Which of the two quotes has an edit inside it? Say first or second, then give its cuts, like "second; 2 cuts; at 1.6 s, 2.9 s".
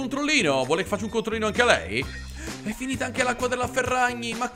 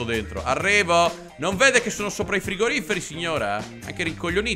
first; 1 cut; at 2.2 s